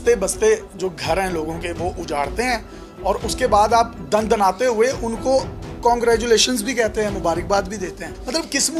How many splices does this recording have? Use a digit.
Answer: 0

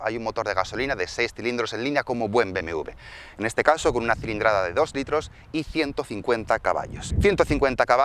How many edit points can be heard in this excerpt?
1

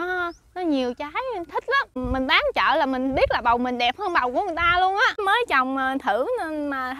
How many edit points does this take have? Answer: 2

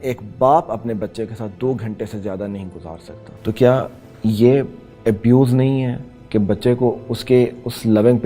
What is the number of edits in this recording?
1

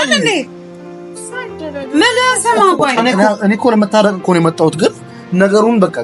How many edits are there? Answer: 1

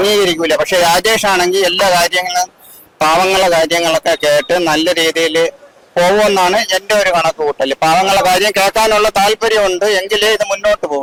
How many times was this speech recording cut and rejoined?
0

